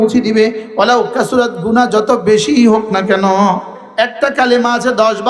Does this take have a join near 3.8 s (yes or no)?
yes